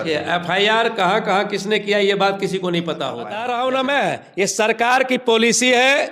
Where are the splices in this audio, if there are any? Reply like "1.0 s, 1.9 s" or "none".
3.3 s